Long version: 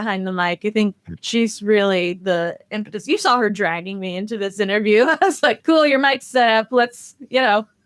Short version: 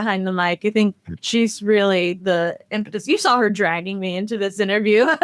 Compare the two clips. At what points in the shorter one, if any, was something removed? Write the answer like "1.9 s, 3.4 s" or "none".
none